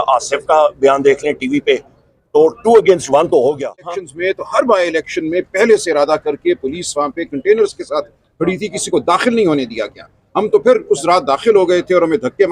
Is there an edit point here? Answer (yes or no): yes